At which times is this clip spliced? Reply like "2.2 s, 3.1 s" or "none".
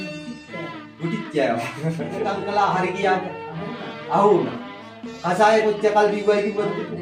2.3 s